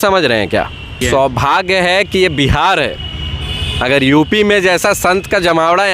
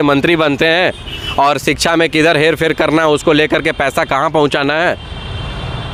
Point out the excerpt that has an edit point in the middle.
first; 1 cut; at 1.0 s

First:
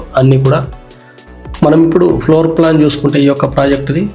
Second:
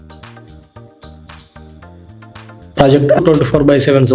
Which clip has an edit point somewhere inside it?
second; 1 cut; at 3.2 s

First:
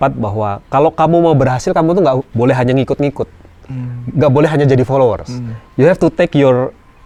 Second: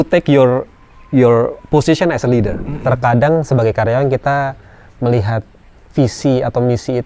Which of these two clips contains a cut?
second; 1 cut; at 2.8 s

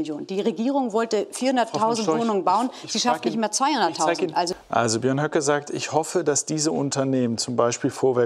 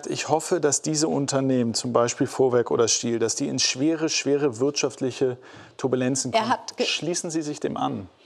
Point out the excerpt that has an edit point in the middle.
first; 1 cut; at 4.5 s

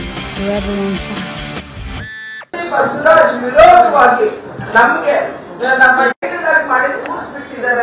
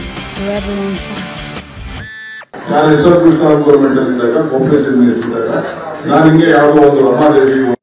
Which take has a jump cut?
second; 1 cut; at 2.6 s

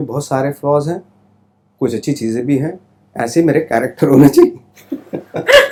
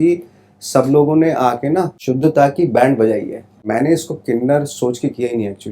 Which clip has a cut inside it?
second; 2 cuts; at 2.0 s, 3.6 s

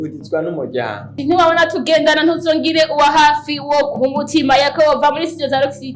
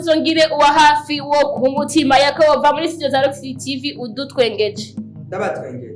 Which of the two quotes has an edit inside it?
first; 1 cut; at 1.1 s

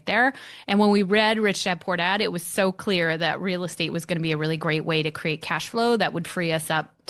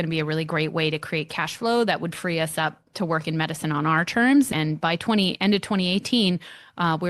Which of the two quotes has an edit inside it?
second; 1 cut; at 4.5 s

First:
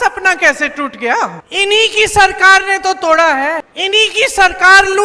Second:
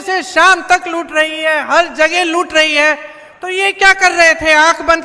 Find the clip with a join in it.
first; 2 cuts; at 1.4 s, 3.7 s

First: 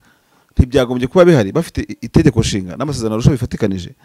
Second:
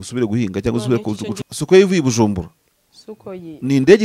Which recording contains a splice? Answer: second; 1 cut; at 1.4 s

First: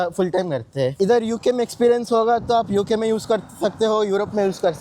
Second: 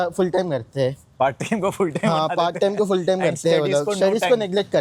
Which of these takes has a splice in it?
first; 1 cut; at 0.9 s

